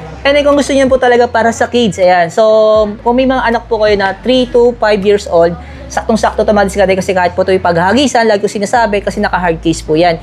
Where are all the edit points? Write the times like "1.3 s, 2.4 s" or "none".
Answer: none